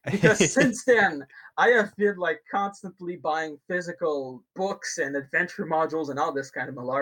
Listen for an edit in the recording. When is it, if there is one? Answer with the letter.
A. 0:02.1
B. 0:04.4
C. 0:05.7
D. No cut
B